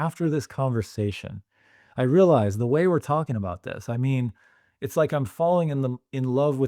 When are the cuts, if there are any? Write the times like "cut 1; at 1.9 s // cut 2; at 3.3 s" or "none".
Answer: none